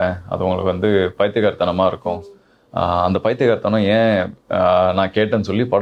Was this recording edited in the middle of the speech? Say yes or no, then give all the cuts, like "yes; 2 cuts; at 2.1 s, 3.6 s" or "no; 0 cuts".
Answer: no; 0 cuts